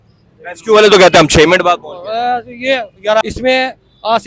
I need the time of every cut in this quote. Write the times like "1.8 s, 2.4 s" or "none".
3.2 s